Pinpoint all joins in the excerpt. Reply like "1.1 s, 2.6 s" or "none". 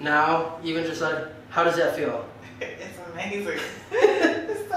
none